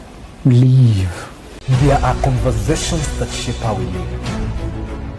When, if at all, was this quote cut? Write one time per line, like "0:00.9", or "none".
0:01.6